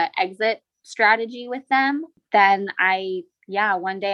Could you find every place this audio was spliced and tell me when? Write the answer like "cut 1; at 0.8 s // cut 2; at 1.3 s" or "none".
cut 1; at 2.1 s